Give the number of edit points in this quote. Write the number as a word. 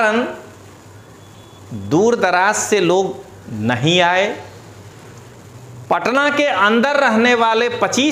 zero